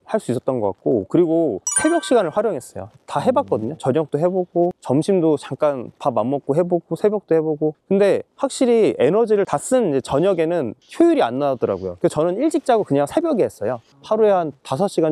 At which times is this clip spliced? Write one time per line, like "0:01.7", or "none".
0:07.8
0:09.5
0:11.9